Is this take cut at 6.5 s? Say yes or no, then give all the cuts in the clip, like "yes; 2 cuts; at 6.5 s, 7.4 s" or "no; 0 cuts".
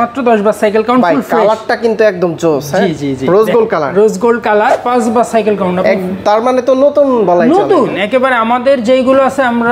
no; 1 cut; at 4.8 s